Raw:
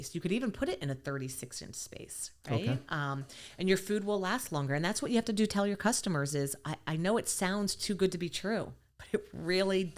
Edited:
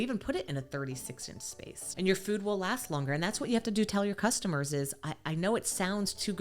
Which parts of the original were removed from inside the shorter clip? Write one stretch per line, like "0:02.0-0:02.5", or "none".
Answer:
0:02.1-0:03.4